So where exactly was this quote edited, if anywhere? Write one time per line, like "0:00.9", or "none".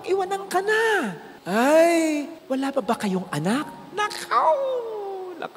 none